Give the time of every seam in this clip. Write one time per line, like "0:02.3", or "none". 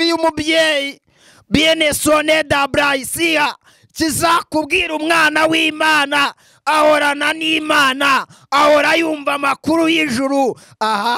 none